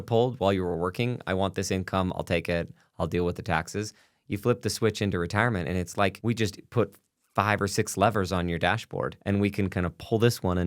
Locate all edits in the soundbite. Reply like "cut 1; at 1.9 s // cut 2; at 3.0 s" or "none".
cut 1; at 6.2 s // cut 2; at 9.2 s